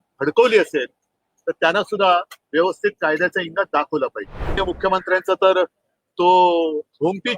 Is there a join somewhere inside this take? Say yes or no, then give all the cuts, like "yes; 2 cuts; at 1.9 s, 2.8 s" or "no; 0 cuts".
yes; 1 cut; at 4.6 s